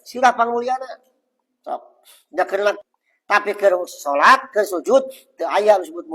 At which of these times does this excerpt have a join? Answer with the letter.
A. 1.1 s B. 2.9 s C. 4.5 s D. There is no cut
B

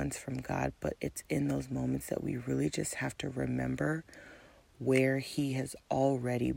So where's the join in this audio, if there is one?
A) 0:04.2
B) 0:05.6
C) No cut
C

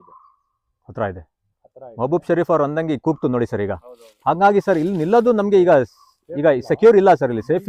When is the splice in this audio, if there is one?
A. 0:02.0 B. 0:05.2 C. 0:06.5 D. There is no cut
D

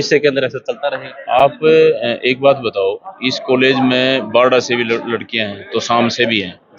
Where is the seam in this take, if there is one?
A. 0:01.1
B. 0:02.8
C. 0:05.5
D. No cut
D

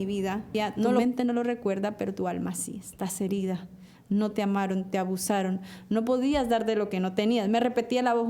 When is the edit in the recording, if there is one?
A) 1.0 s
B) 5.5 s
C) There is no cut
A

